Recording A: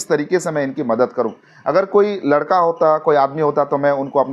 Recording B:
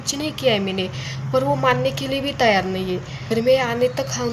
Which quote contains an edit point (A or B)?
B